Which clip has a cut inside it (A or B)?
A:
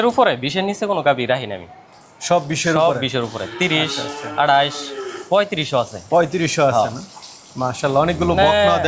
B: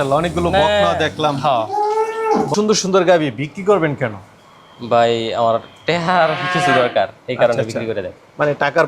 B